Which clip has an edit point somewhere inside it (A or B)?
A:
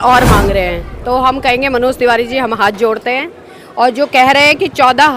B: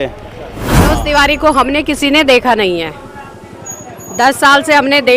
B